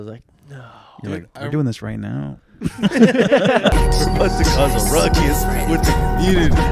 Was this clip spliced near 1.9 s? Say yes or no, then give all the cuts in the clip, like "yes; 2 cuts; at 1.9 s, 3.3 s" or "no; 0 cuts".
no; 1 cut; at 3.7 s